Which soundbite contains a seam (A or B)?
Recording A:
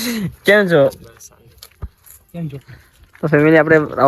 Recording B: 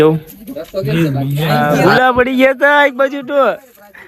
B